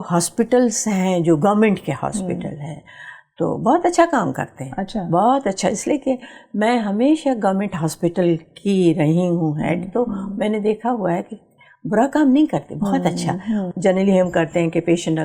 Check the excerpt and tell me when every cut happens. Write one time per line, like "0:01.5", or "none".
0:13.7